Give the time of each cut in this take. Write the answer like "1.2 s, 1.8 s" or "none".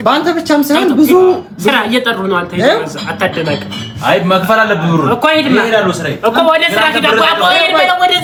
none

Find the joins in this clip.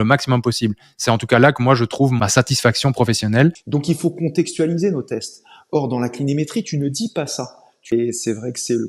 2.2 s, 3.6 s, 7.9 s

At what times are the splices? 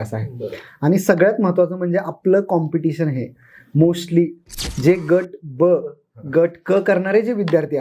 none

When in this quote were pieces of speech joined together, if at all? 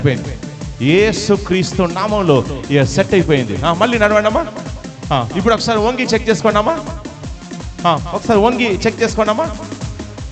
none

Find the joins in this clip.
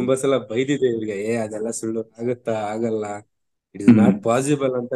2.2 s

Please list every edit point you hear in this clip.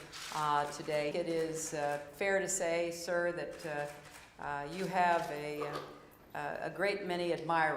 1.1 s

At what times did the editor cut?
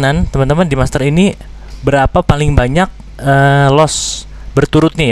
none

